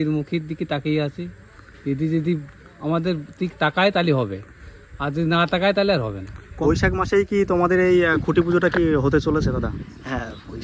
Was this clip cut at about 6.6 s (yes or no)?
yes